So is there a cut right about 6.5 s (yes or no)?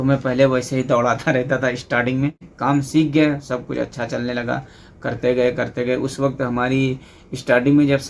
no